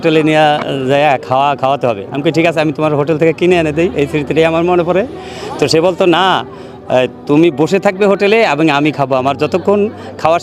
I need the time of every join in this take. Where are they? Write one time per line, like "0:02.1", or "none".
none